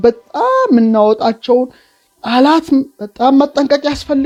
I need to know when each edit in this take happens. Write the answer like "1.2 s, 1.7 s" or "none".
none